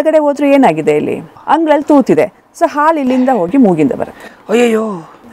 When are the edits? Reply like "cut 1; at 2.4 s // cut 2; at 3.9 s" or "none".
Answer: cut 1; at 1.3 s